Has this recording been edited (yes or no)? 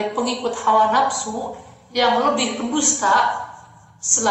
no